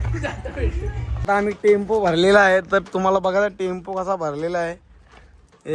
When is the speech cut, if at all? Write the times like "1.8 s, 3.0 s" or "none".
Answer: 1.1 s

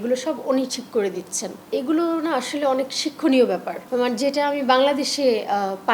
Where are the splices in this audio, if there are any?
1.6 s

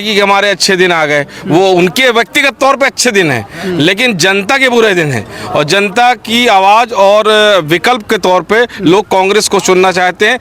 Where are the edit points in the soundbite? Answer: none

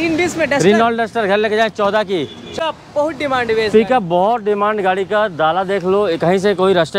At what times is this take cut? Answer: 2.6 s

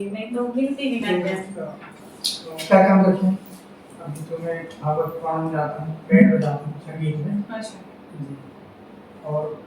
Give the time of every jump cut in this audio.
1.8 s

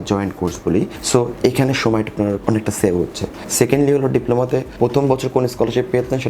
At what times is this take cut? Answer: 1.0 s, 2.4 s, 3.4 s, 4.7 s

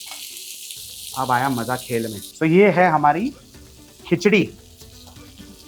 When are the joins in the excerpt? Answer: 2.3 s

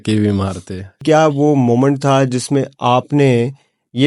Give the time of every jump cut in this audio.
1.0 s

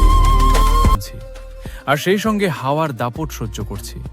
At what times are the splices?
0.9 s

